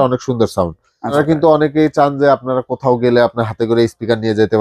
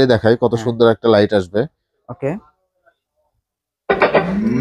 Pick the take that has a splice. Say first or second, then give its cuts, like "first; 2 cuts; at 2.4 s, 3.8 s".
first; 1 cut; at 1.1 s